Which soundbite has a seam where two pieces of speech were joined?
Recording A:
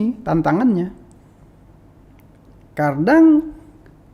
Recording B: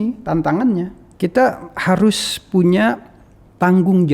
B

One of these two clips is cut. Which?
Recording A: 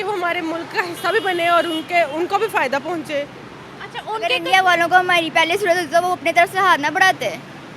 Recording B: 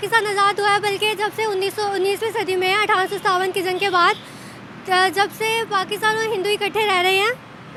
A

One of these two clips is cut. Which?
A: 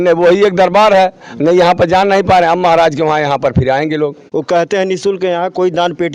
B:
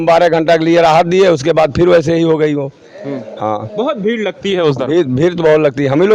A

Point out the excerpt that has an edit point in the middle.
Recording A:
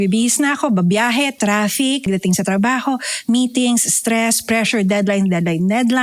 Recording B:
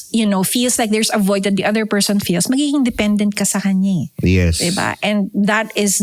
A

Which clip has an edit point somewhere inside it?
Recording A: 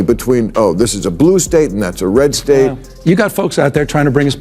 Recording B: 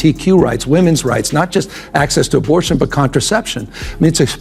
A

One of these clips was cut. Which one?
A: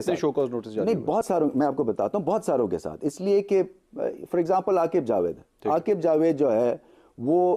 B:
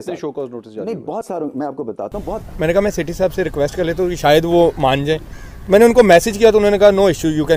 B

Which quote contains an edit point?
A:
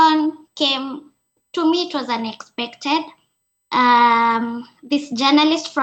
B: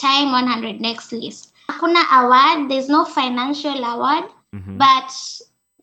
B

